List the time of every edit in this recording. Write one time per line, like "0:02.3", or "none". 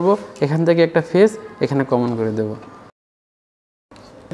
none